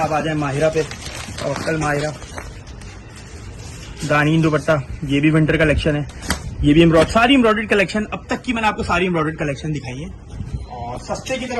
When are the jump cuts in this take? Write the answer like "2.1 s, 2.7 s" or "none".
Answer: none